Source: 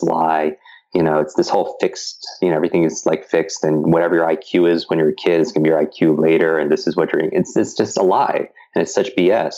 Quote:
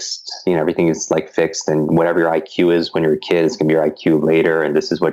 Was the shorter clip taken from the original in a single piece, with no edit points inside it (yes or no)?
yes